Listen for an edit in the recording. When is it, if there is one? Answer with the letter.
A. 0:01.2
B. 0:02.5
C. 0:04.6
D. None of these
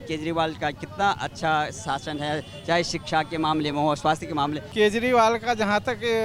C